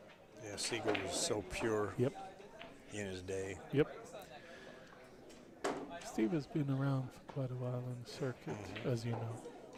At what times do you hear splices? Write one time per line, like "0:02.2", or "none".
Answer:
none

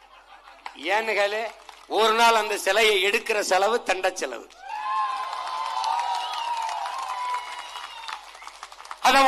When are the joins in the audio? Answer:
none

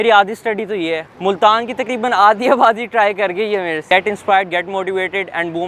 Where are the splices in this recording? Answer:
0:01.0
0:03.8

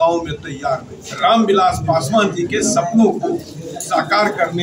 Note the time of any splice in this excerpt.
0:01.0

